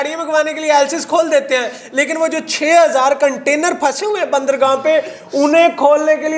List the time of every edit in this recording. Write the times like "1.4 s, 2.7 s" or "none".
none